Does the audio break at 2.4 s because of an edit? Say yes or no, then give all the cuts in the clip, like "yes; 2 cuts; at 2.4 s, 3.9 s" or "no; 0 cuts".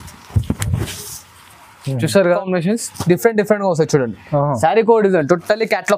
yes; 1 cut; at 2.4 s